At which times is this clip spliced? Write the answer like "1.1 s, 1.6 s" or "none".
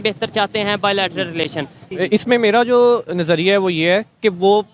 1.8 s